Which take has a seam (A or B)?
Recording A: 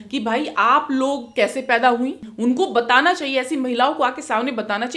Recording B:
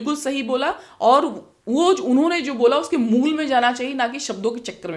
A